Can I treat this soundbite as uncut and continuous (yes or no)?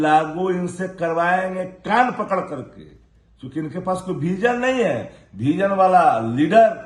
yes